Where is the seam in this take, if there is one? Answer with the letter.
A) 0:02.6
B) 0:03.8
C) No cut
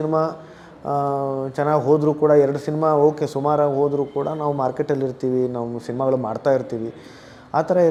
C